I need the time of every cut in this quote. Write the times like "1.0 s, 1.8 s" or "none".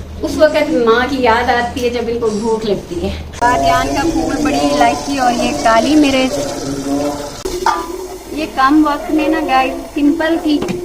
3.3 s, 7.5 s